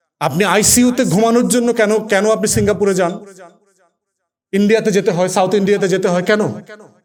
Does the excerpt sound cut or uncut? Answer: uncut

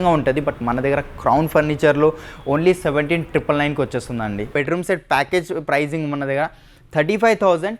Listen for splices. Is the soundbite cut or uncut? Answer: cut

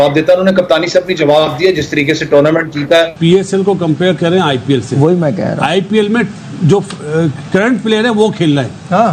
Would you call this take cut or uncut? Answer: cut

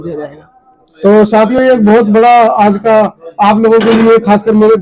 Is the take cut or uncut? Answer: uncut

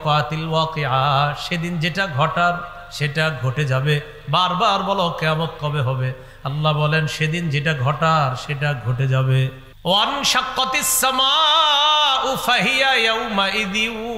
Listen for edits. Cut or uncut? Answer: cut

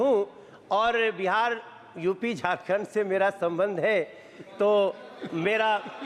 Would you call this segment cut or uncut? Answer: uncut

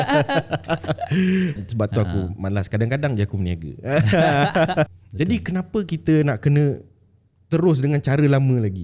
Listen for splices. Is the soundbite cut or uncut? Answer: cut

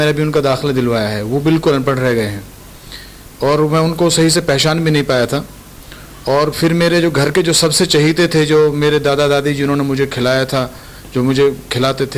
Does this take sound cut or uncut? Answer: uncut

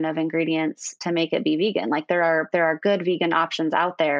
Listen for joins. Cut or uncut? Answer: uncut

